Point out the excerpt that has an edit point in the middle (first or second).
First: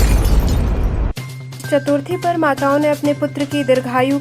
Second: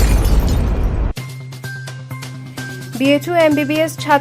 second